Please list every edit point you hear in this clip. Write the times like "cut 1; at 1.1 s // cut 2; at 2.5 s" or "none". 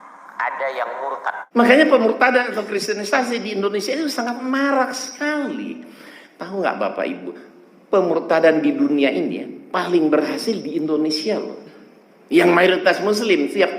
cut 1; at 1.4 s